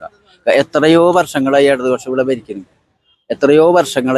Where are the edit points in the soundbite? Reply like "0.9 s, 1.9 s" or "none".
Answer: none